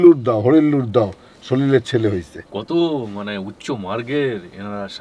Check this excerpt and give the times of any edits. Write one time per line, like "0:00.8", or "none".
none